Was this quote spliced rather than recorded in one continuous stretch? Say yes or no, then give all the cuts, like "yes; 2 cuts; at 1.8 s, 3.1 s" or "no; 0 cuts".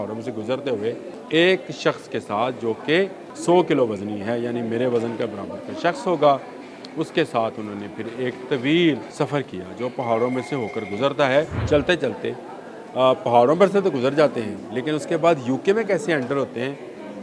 yes; 4 cuts; at 1.1 s, 3.3 s, 9.1 s, 11.6 s